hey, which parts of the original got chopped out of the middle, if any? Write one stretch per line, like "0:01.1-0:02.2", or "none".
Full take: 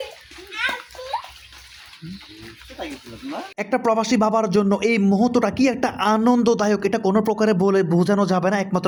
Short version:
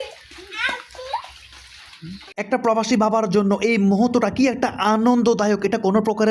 0:02.3-0:03.5